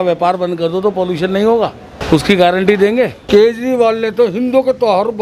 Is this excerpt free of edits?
no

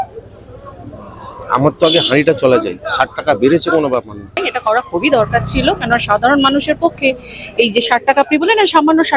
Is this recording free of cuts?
no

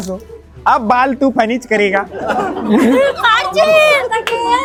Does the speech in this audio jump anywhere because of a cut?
no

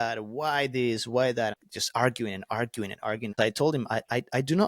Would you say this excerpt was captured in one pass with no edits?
no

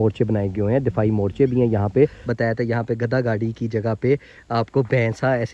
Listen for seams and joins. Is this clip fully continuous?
no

